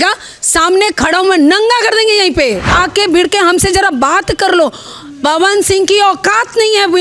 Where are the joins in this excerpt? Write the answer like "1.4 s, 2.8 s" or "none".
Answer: 2.7 s